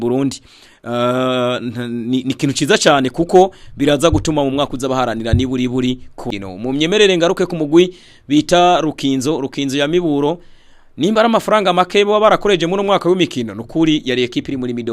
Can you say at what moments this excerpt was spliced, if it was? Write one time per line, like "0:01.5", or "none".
0:06.2

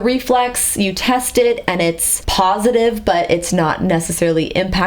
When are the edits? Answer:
0:02.1

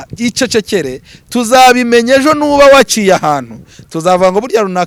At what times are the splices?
none

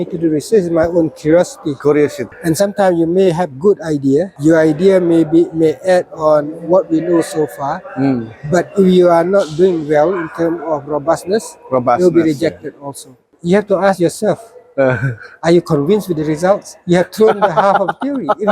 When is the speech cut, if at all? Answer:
0:02.3
0:04.3
0:13.3

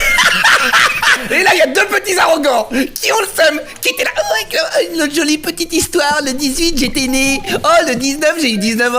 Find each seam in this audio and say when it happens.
0:01.3

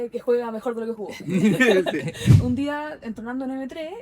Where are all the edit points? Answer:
0:02.3

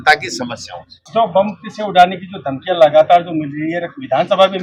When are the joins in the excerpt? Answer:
none

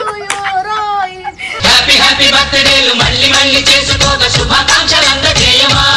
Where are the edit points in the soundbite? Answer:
none

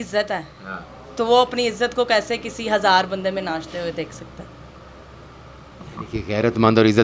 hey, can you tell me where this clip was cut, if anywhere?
none

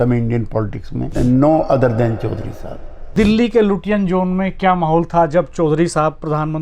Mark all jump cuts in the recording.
0:01.1
0:03.1

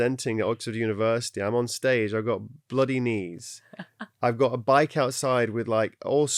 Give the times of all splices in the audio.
none

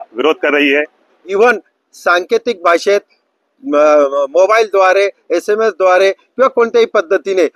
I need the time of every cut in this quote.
0:01.2

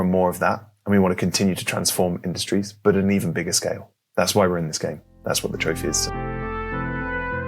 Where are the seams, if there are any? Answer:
0:06.1

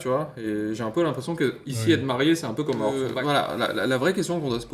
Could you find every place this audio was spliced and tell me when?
0:03.0

